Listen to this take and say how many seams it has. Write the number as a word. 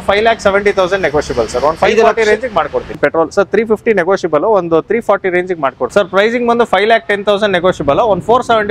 two